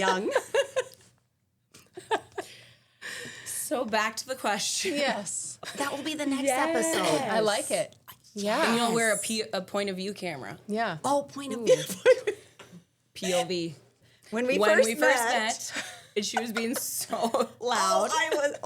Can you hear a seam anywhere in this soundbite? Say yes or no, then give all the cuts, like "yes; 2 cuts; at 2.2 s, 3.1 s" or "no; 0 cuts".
yes; 2 cuts; at 5.6 s, 14.1 s